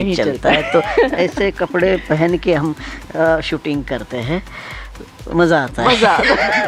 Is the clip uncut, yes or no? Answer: yes